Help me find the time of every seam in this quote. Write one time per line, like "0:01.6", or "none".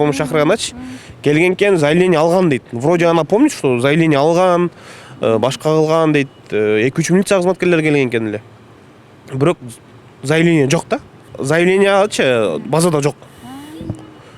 none